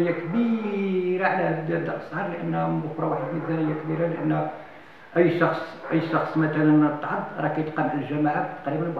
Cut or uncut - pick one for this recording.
uncut